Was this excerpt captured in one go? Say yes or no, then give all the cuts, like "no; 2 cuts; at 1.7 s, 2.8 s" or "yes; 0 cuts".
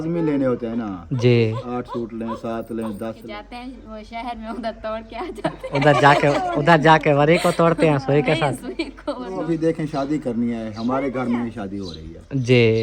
no; 2 cuts; at 3.2 s, 9.4 s